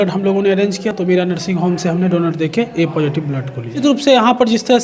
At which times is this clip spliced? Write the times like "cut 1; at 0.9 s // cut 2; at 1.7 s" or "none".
none